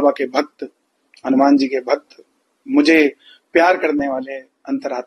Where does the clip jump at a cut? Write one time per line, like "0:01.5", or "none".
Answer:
none